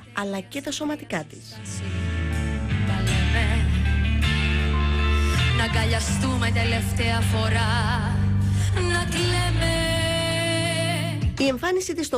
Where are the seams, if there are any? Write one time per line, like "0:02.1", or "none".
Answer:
0:08.7

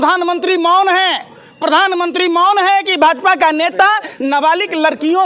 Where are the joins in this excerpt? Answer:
none

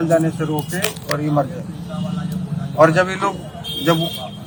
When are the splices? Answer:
none

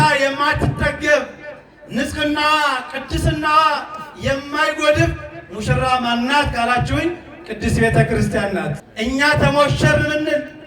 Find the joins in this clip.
0:08.8

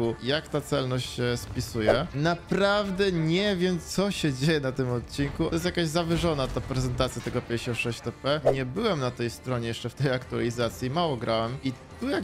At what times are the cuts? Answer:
0:02.1
0:08.5

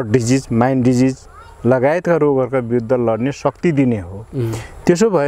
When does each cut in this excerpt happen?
none

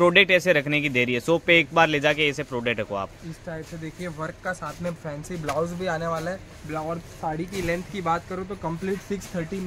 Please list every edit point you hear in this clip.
none

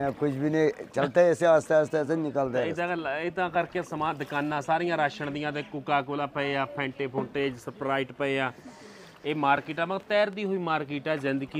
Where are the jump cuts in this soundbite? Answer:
none

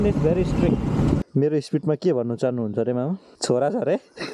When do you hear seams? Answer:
0:01.2
0:03.3

